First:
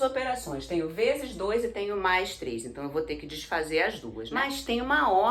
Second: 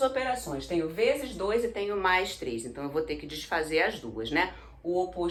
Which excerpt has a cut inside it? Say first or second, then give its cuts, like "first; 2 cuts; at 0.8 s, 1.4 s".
first; 1 cut; at 4.2 s